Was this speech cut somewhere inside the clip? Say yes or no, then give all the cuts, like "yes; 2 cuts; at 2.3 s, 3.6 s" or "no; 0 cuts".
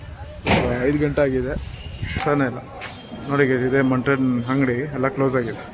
yes; 1 cut; at 2.2 s